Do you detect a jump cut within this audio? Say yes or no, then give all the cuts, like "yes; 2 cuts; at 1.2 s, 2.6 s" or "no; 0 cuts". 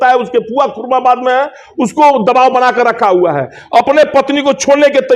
no; 0 cuts